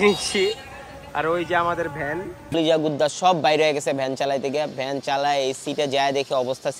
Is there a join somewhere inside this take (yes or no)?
yes